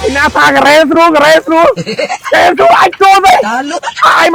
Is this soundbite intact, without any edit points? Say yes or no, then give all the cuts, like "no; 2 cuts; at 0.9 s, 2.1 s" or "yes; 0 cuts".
yes; 0 cuts